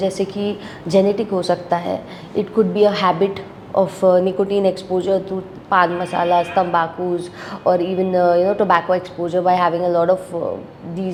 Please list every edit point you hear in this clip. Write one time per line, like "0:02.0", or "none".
none